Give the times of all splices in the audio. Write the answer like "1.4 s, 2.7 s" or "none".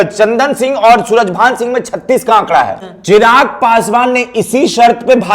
2.9 s